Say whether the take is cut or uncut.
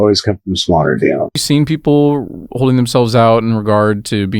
cut